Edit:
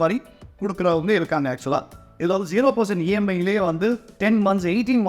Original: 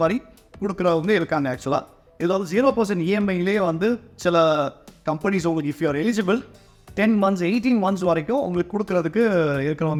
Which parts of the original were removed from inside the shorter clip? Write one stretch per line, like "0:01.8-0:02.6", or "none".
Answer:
0:04.1-0:06.8